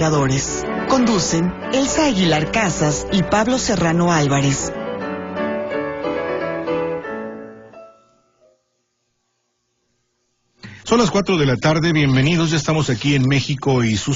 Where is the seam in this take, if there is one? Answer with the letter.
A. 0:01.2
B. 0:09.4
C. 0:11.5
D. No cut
D